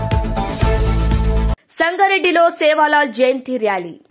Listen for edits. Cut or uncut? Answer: uncut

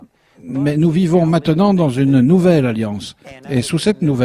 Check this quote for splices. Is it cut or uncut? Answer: uncut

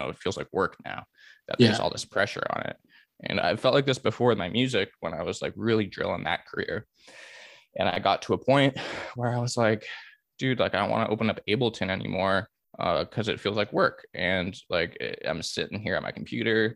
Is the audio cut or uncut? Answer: uncut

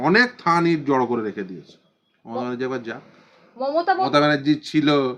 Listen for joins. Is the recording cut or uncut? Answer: cut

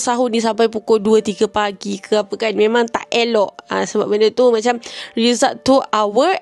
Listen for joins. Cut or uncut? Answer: uncut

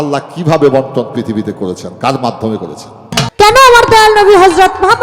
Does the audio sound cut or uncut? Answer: cut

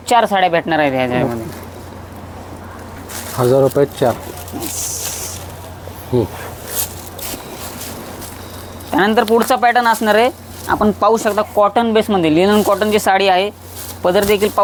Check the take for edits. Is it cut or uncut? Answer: uncut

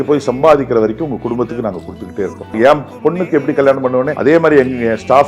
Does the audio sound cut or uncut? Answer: cut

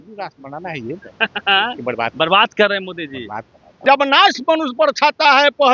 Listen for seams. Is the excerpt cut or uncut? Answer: cut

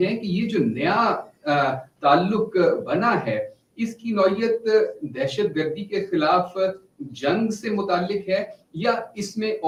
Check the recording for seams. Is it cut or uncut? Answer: uncut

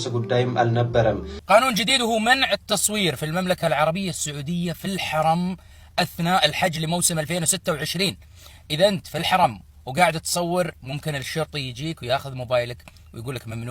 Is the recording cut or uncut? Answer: cut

